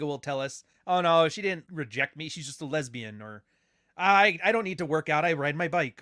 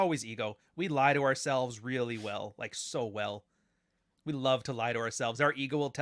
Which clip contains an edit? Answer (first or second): first